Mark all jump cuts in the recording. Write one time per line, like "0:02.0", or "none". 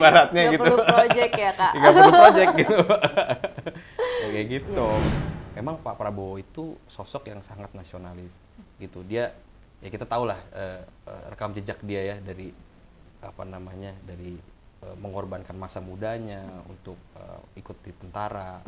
0:05.1